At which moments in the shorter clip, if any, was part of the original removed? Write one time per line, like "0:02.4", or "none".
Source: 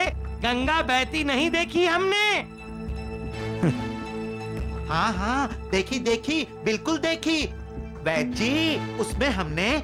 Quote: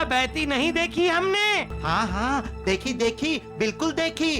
0:01.7

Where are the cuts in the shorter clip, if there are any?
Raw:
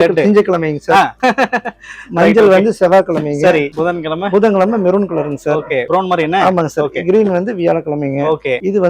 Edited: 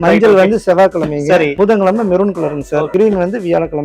0:01.5
0:02.9

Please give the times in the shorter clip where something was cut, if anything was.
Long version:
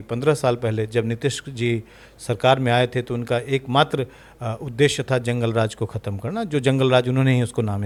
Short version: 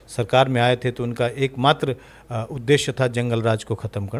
none

